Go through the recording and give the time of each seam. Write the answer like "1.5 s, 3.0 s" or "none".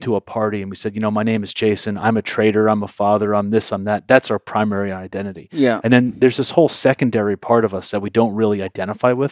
none